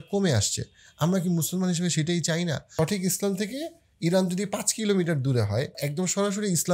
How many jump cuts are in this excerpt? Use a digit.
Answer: 2